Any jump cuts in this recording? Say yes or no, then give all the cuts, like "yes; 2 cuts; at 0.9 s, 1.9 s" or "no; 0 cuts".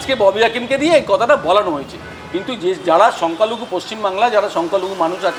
no; 0 cuts